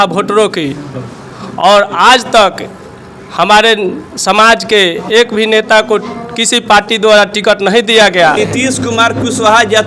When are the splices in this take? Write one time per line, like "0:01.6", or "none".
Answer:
0:08.4